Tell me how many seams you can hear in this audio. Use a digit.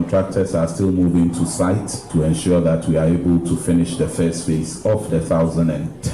1